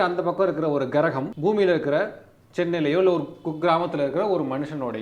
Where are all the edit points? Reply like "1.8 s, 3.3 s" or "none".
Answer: 1.3 s